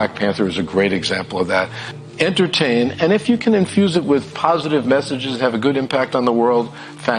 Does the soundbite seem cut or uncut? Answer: uncut